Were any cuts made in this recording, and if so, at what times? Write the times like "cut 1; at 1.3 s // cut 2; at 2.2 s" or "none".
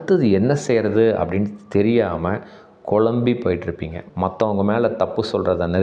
cut 1; at 4.0 s